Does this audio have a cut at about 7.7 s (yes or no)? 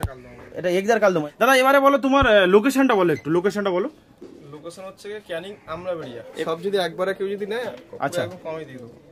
no